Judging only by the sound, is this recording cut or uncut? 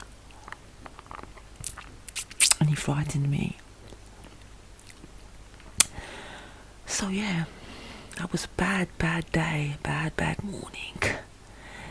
uncut